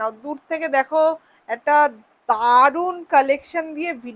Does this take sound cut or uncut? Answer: uncut